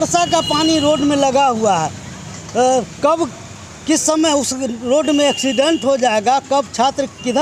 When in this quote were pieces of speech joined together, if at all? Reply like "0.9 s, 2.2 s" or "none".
none